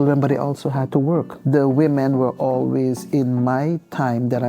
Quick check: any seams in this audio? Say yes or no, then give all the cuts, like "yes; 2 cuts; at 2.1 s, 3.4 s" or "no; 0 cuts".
yes; 1 cut; at 1.4 s